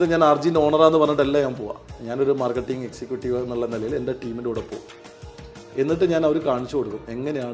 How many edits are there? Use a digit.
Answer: 0